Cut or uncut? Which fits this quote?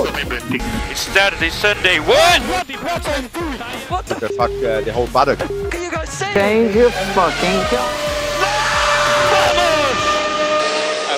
uncut